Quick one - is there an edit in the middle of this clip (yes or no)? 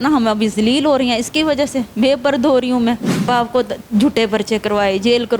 yes